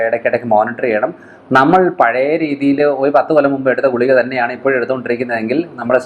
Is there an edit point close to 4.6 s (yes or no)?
no